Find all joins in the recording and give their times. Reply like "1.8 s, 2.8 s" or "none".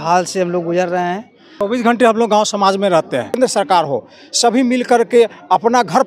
1.5 s, 3.4 s